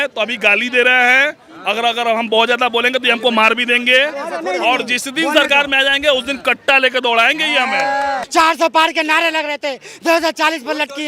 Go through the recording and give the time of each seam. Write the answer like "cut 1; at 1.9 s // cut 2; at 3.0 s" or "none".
cut 1; at 8.2 s